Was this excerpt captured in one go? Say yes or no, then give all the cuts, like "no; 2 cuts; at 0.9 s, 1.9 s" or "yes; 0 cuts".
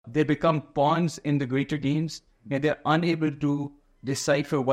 yes; 0 cuts